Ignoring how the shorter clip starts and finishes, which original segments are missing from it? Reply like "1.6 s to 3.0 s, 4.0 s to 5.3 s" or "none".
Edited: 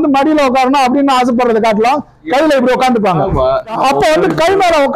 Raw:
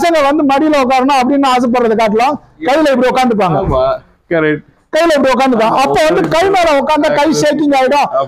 4.1 s to 5.7 s